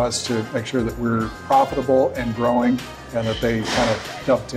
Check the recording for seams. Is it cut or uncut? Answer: uncut